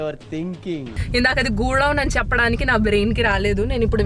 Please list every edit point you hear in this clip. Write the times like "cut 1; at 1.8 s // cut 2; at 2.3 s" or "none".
cut 1; at 0.9 s